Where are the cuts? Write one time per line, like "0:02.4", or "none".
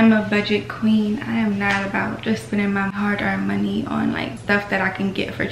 0:03.0
0:04.4